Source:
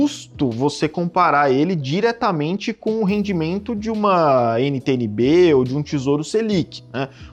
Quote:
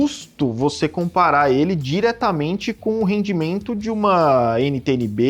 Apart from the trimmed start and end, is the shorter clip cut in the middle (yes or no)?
no